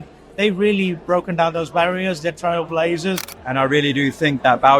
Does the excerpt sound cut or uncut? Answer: cut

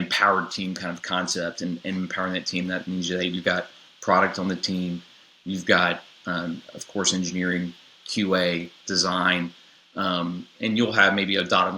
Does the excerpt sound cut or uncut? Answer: uncut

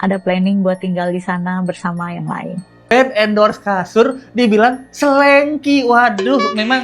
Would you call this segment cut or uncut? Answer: cut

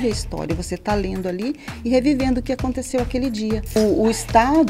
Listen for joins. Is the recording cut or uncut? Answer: cut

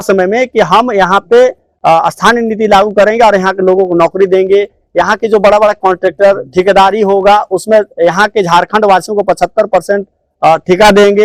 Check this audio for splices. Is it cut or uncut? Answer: uncut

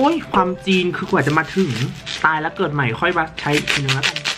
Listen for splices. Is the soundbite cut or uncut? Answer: cut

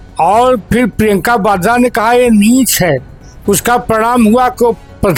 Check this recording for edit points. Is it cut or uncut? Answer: uncut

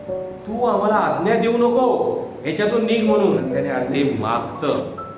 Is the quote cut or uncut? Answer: cut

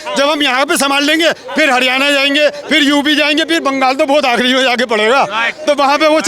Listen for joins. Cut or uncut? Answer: uncut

